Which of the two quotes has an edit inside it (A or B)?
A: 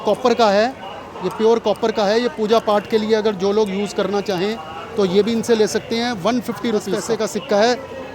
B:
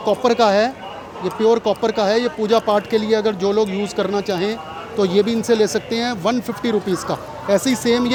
A